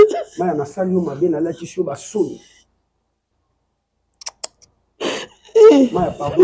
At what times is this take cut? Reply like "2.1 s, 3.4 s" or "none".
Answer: none